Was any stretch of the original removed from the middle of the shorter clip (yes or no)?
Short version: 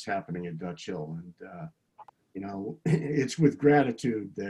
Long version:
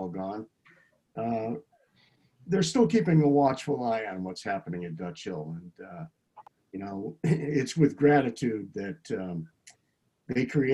no